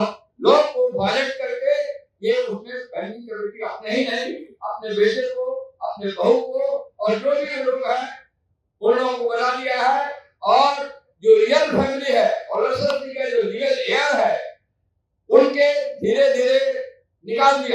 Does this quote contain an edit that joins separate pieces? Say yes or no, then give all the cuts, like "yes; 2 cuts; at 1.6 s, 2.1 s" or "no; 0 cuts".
no; 0 cuts